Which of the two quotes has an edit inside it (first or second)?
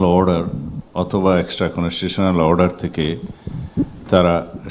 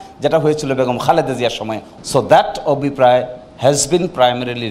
second